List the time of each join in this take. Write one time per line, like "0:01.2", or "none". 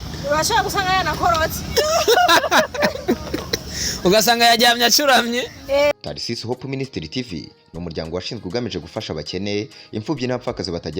0:05.9